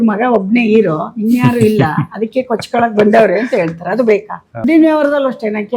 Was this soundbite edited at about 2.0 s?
no; 1 cut; at 4.6 s

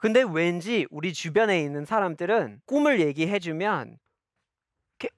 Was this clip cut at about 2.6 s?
yes; 1 cut; at 2.6 s

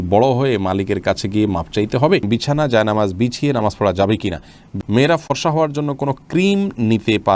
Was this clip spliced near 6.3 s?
no; 2 cuts; at 2.2 s, 4.6 s

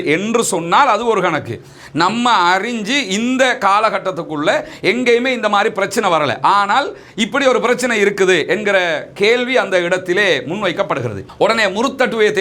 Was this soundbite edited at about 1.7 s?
no; 1 cut; at 11.3 s

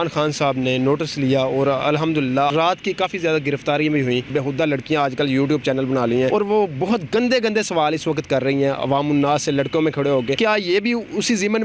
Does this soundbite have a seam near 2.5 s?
yes; 4 cuts; at 2.5 s, 4.3 s, 6.3 s, 10.4 s

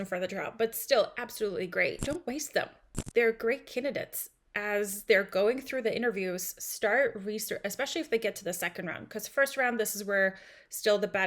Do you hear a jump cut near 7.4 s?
no; 1 cut; at 2.0 s

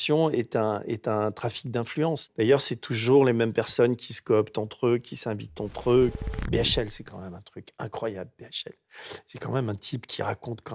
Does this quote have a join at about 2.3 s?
yes; 2 cuts; at 2.3 s, 6.2 s

